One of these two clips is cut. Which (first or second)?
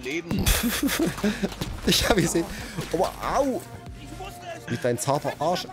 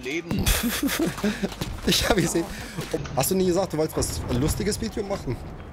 second